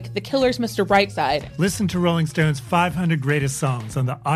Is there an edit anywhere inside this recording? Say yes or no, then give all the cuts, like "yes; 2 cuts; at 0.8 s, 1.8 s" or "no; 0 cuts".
yes; 1 cut; at 1.4 s